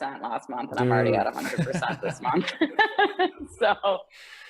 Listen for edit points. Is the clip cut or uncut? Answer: uncut